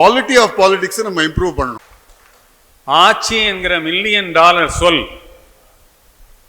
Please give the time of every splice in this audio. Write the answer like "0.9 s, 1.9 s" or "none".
1.9 s